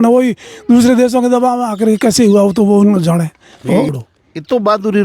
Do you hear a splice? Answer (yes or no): yes